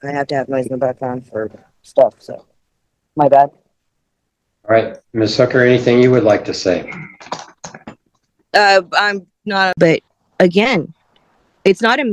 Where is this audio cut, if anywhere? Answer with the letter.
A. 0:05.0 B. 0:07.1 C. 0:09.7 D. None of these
C